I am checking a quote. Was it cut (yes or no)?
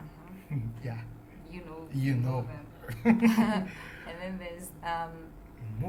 no